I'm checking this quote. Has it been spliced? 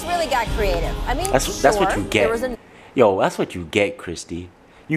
yes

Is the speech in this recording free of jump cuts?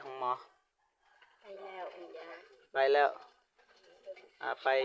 yes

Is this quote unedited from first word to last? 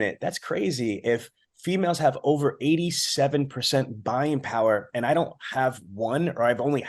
yes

